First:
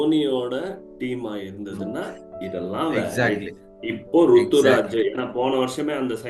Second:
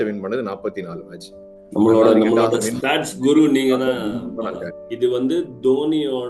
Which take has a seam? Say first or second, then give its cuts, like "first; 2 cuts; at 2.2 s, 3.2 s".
second; 1 cut; at 4.8 s